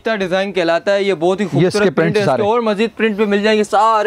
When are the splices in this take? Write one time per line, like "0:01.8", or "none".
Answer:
none